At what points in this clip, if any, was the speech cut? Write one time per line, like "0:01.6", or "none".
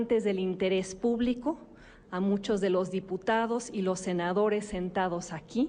0:04.2